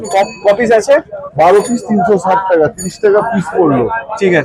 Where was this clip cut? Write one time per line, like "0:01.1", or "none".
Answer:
none